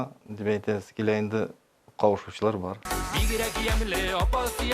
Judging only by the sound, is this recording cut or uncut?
cut